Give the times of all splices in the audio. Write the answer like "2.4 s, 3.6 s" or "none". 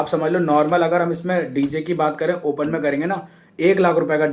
none